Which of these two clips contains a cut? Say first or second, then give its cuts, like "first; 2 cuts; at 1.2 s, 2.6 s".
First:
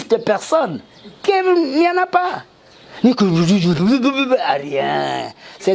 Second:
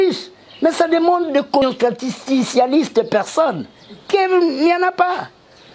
second; 1 cut; at 1.6 s